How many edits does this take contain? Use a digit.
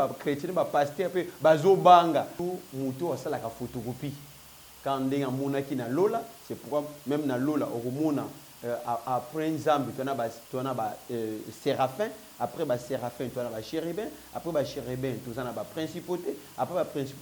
1